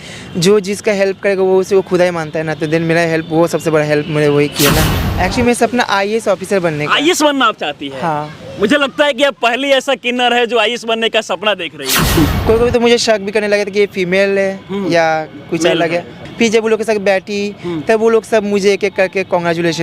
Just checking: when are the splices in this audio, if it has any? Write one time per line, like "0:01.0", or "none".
0:04.9
0:12.2
0:16.2